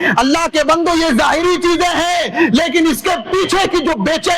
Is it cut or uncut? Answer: uncut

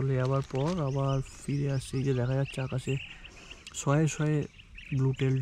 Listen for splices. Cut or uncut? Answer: uncut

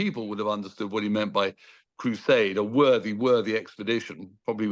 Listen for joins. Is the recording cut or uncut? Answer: uncut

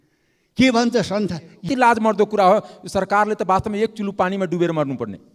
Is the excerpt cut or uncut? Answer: cut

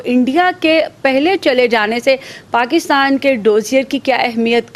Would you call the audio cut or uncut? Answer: uncut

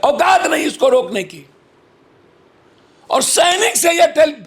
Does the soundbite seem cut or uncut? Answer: uncut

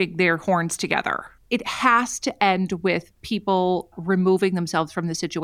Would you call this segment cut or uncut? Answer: cut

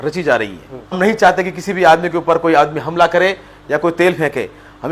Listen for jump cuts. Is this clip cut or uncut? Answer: cut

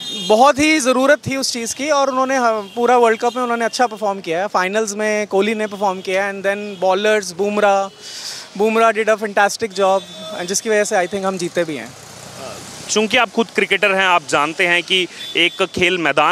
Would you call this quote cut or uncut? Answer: uncut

